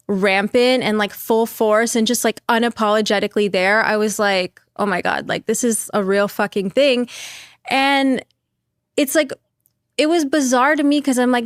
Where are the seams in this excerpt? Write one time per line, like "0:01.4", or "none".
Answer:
none